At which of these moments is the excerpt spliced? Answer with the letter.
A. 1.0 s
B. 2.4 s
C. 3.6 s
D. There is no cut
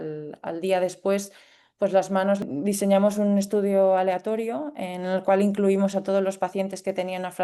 B